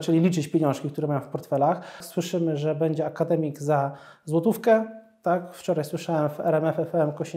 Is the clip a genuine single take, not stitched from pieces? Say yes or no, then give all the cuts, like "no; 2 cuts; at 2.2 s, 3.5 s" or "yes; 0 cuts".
no; 1 cut; at 2.0 s